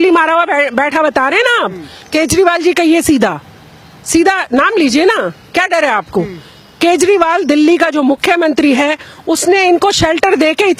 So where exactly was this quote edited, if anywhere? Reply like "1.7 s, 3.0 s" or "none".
none